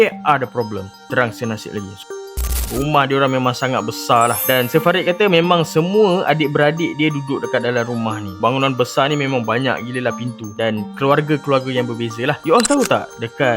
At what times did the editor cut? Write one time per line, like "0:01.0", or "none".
0:02.2
0:12.4